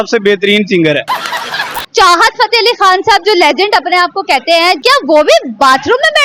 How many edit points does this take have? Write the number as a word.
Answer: two